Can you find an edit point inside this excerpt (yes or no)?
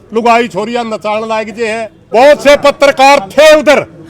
yes